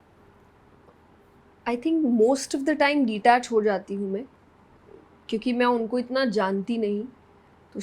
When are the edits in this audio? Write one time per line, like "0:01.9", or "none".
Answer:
none